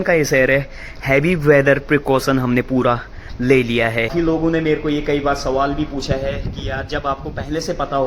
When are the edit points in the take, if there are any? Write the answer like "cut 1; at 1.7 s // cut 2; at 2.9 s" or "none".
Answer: cut 1; at 4.1 s